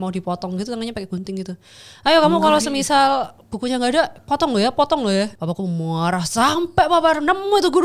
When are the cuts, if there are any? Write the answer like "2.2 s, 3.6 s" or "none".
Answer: 5.4 s